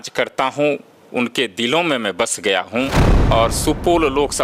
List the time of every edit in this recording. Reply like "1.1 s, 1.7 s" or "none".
3.1 s